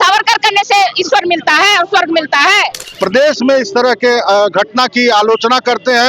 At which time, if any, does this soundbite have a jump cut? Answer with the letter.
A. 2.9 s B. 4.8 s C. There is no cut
A